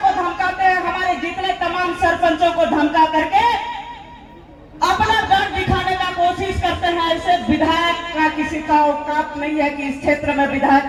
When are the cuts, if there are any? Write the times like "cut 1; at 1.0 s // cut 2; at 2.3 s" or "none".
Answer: none